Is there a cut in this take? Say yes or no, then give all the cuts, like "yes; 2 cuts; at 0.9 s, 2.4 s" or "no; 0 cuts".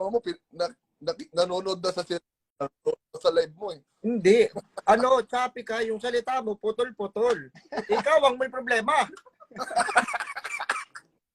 no; 0 cuts